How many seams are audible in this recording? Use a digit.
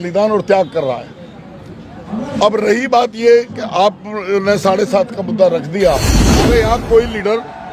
1